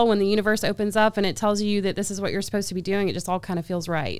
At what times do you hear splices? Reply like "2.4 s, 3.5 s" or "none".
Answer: none

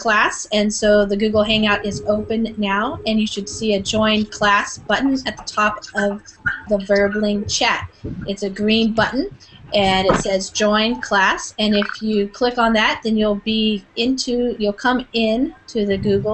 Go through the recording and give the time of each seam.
none

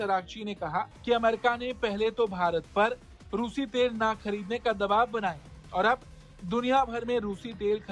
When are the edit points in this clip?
none

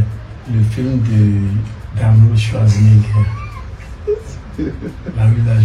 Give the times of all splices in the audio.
none

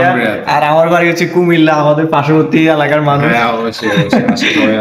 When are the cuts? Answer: none

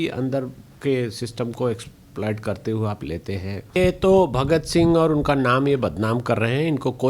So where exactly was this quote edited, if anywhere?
3.8 s

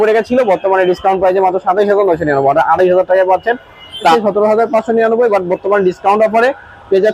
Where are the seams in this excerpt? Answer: 4.1 s

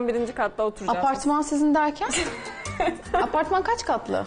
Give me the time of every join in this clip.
3.0 s

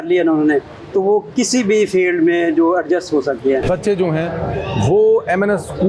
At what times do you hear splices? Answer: 3.6 s

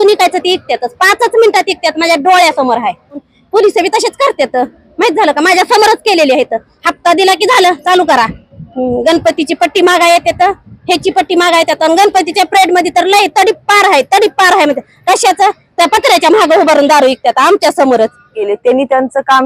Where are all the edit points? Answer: 3.3 s, 18.4 s

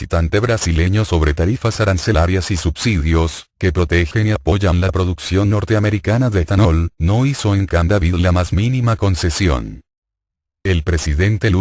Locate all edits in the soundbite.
2.2 s

